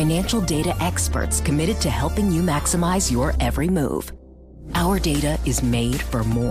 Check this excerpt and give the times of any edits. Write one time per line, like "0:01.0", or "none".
none